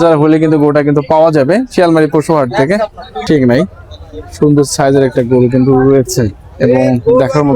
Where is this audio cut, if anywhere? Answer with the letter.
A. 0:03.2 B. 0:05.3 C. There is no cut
A